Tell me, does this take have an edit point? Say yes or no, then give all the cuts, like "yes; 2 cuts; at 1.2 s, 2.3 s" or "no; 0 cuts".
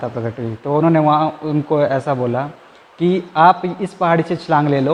no; 0 cuts